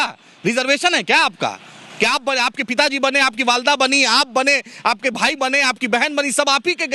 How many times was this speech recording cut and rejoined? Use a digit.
0